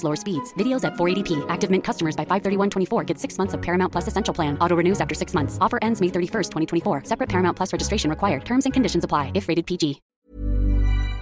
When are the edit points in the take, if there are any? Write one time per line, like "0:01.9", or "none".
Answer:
0:10.1